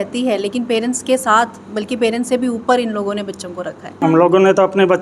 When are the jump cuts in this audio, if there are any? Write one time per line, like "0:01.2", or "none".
0:04.0